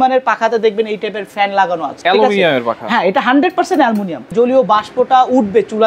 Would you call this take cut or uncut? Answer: cut